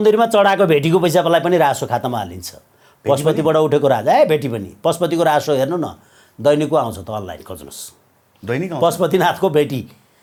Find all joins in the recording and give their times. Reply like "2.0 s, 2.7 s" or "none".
none